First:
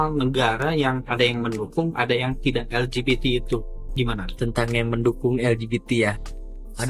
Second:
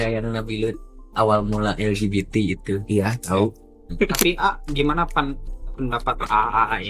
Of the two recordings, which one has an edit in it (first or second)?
second